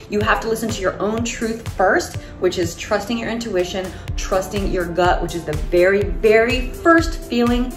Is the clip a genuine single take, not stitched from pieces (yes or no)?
yes